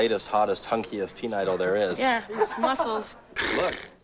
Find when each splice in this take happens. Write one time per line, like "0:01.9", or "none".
none